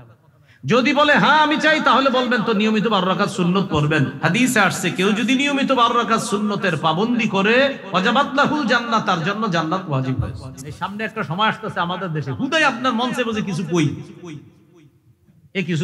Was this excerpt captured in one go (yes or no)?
no